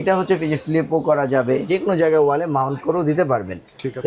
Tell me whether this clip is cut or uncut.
cut